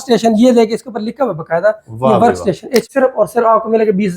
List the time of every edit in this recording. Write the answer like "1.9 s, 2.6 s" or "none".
2.9 s